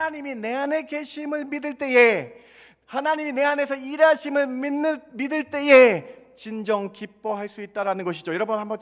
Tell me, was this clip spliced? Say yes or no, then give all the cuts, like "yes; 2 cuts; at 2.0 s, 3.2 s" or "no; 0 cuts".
no; 0 cuts